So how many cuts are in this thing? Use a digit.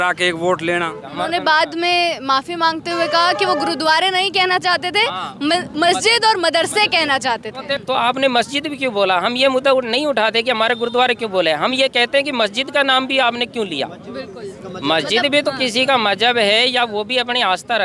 2